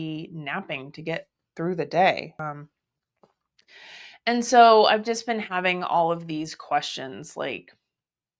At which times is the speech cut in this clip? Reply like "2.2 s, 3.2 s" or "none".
2.4 s